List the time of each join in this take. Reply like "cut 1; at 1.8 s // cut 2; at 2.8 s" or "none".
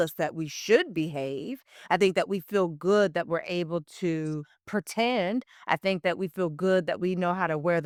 none